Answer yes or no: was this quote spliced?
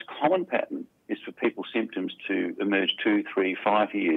no